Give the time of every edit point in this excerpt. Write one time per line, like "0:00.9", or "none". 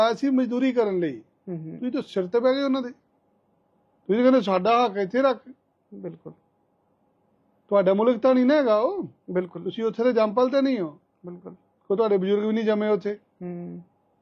none